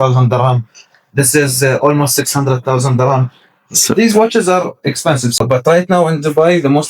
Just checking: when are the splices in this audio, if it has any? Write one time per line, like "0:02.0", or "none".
0:05.4